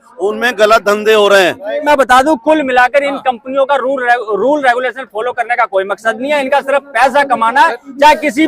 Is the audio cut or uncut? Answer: cut